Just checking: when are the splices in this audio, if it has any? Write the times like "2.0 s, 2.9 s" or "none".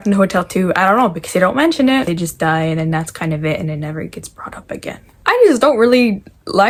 none